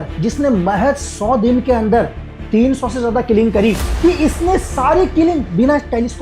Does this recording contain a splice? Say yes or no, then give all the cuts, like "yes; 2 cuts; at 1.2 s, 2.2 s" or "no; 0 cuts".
yes; 1 cut; at 3.9 s